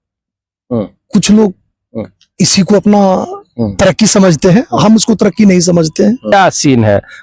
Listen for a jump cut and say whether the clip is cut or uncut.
cut